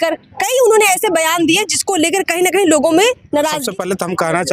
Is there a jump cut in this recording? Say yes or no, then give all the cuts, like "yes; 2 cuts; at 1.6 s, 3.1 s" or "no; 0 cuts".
yes; 1 cut; at 3.6 s